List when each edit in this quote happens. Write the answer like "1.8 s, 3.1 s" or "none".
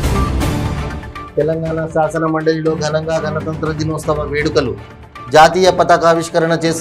1.1 s